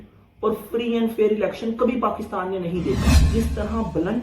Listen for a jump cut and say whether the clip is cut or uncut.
cut